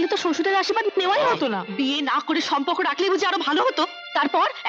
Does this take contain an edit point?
yes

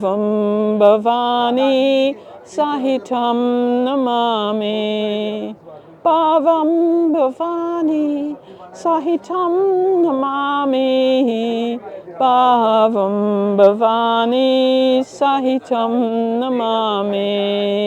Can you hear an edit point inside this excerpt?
no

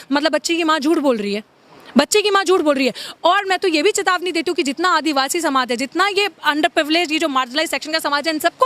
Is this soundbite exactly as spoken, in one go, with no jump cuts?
yes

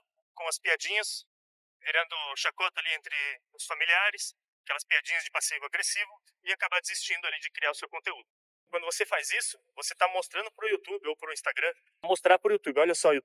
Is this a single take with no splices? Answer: no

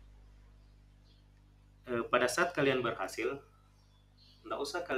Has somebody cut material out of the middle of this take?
no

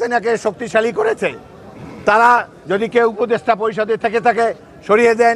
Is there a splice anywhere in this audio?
no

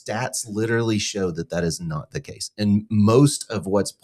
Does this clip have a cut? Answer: no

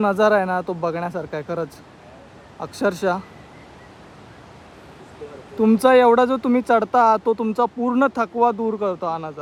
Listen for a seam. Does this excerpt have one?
no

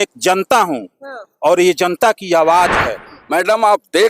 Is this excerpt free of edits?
no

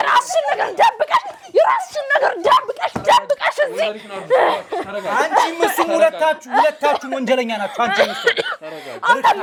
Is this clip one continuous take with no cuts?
yes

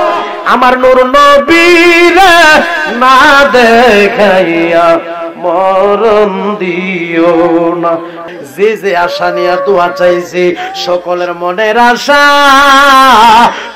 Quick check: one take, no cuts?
no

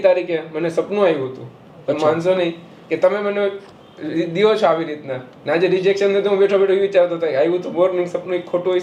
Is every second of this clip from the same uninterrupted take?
yes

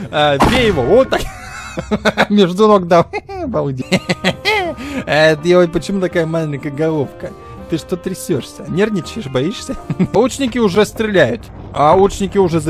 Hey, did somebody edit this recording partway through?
yes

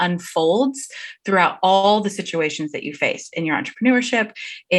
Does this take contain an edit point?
no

